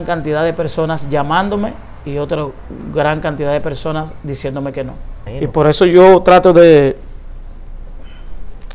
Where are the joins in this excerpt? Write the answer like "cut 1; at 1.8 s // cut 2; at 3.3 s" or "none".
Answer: cut 1; at 5.2 s